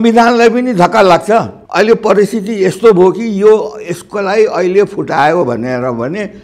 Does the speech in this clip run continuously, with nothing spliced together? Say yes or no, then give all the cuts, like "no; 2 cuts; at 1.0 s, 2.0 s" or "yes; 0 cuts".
no; 1 cut; at 1.6 s